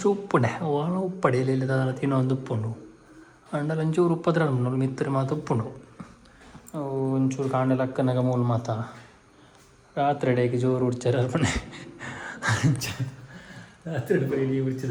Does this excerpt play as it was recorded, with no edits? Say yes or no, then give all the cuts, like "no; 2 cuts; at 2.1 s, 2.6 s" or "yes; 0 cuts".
yes; 0 cuts